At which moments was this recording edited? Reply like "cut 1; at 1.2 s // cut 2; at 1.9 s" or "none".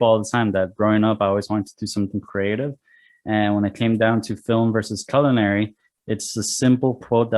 none